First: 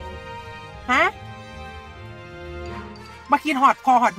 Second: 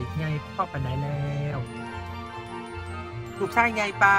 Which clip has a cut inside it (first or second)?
first